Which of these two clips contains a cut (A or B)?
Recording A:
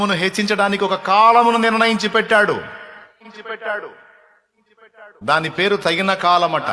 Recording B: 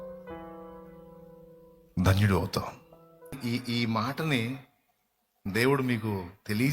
B